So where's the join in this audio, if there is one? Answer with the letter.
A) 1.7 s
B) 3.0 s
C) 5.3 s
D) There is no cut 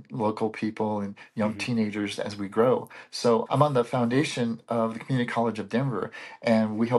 D